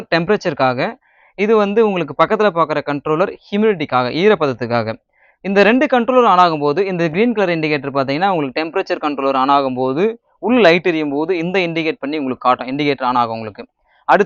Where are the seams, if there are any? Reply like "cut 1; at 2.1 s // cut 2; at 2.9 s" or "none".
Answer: none